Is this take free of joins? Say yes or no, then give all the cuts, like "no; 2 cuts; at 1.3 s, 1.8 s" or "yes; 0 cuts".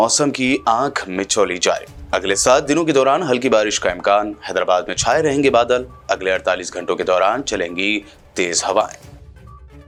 yes; 0 cuts